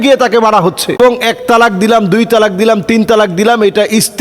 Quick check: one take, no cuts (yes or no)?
no